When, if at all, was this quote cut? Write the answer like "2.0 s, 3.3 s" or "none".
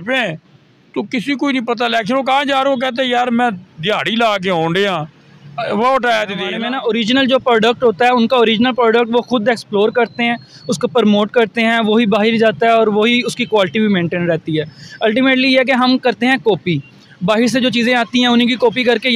6.6 s